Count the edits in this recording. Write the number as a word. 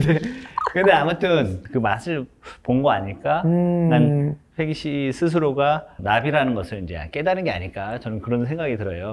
two